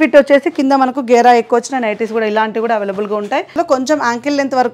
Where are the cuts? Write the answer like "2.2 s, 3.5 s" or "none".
3.6 s